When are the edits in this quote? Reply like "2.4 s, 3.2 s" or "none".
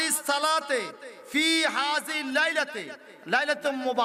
none